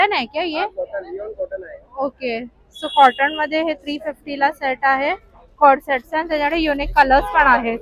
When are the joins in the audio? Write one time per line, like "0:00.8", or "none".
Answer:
none

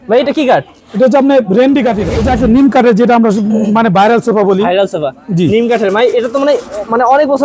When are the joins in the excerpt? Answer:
0:02.1

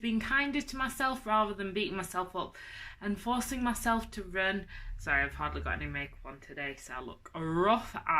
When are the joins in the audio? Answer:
none

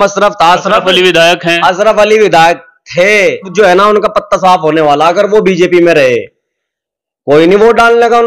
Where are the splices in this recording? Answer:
0:03.5

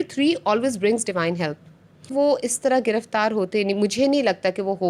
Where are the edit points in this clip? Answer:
0:02.1

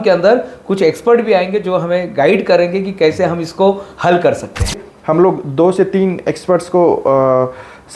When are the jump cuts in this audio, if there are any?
0:04.9

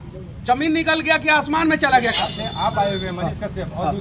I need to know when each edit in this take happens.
0:02.2

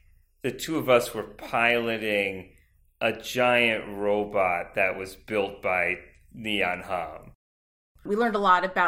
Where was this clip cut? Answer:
0:07.8

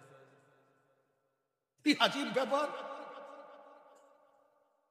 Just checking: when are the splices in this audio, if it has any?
none

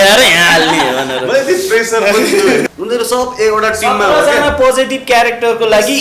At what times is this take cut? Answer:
0:02.7

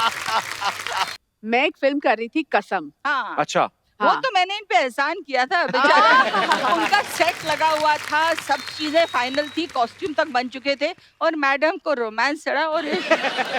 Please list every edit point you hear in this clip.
0:01.2

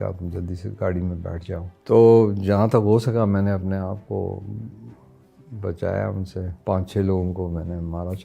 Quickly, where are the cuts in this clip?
0:01.7
0:06.5

